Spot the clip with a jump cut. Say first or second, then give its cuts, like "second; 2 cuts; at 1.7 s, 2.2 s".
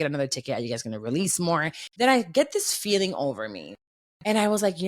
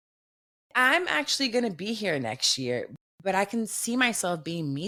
first; 1 cut; at 1.8 s